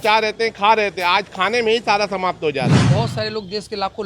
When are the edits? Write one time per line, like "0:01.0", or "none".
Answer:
0:02.8

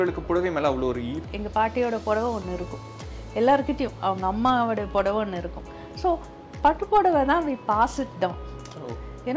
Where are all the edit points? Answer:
0:01.2

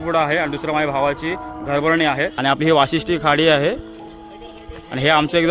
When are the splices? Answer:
0:02.3

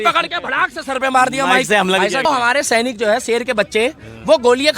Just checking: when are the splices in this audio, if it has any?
0:02.3

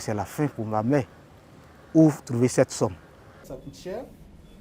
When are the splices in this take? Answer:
0:03.5

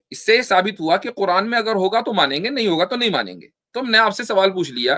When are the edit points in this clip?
none

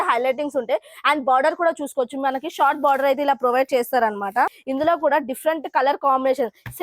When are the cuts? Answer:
0:04.6

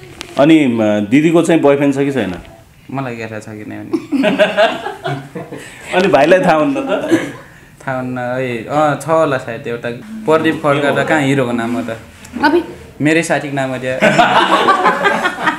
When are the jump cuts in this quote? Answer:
0:09.9

